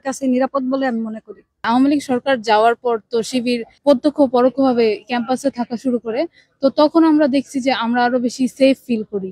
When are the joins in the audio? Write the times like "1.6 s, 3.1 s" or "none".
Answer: 1.6 s